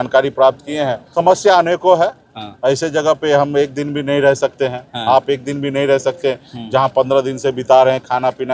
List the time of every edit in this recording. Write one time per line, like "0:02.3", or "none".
0:01.0